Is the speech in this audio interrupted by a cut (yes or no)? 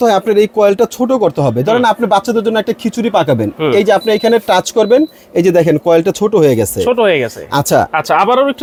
no